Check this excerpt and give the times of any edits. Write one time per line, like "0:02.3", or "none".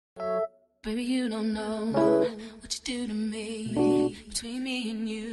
none